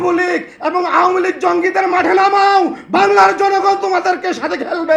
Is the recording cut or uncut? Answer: uncut